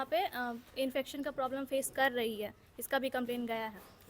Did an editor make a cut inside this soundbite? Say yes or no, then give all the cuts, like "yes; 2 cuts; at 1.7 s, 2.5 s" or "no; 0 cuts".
no; 0 cuts